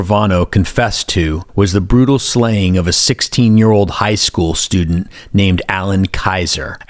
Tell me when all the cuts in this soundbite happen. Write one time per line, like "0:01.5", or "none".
0:01.4